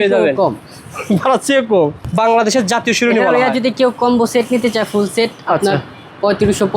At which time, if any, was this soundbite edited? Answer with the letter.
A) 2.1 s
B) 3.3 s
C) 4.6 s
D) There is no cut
A